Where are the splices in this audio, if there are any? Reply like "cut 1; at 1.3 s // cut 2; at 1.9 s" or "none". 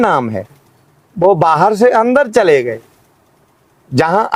none